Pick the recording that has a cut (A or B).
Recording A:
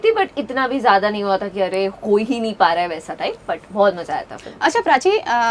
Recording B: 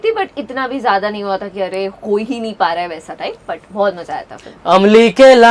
B